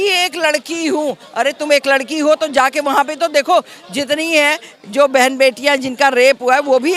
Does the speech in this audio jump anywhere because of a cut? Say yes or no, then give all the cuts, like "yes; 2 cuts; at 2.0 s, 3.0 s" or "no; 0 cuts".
no; 0 cuts